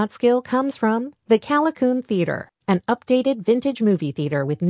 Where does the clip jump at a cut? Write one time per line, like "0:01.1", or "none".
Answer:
none